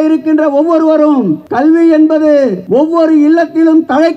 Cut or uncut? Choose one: cut